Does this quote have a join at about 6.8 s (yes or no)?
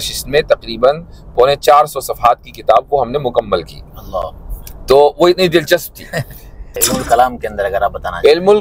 yes